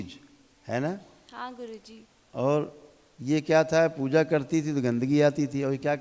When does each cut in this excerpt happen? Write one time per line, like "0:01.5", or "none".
none